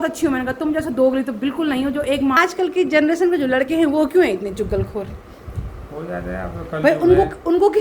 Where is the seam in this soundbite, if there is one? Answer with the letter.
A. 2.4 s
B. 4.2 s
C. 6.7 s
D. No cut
A